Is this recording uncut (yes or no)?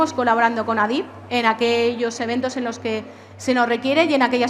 yes